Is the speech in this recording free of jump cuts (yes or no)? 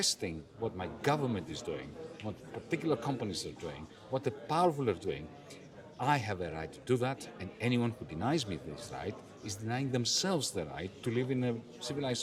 yes